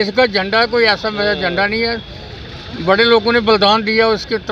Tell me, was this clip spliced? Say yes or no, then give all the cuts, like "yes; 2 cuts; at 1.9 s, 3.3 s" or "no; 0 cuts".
no; 0 cuts